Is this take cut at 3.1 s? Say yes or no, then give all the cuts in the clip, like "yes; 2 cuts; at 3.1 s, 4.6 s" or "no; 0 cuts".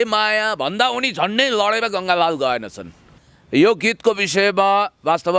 yes; 1 cut; at 3.1 s